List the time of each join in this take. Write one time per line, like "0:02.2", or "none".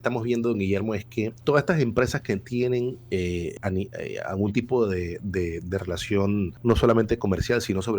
0:01.3
0:03.5
0:06.5